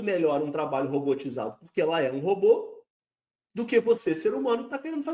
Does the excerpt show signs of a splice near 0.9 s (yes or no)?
no